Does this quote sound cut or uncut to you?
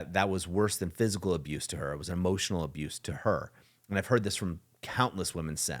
uncut